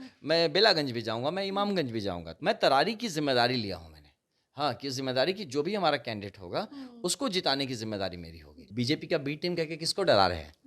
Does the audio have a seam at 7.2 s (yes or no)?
no